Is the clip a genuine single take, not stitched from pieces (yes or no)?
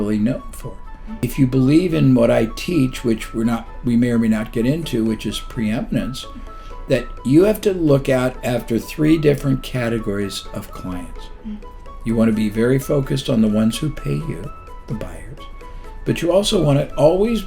no